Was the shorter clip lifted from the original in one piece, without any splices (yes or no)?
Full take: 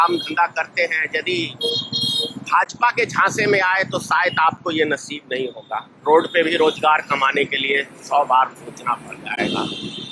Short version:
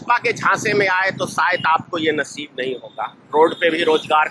yes